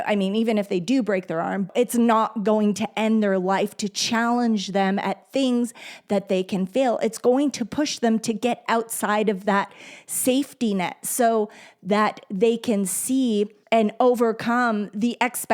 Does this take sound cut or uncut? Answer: cut